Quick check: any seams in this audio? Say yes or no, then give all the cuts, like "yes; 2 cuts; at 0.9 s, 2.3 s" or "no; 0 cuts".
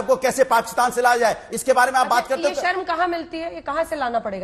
no; 0 cuts